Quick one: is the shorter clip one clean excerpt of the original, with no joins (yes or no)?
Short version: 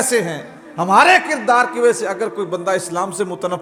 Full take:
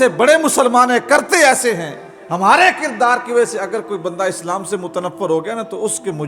yes